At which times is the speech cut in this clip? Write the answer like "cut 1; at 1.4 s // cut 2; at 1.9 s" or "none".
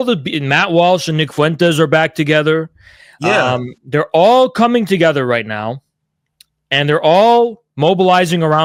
none